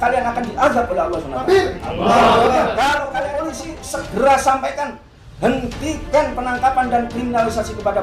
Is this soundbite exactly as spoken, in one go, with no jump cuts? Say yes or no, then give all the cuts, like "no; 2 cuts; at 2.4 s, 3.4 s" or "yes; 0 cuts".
no; 1 cut; at 3.5 s